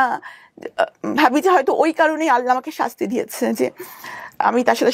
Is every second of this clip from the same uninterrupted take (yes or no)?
yes